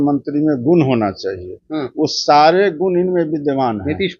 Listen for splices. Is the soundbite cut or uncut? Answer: uncut